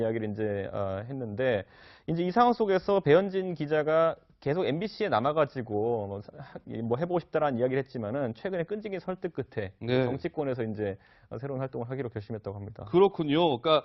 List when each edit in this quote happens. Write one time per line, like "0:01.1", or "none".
0:02.1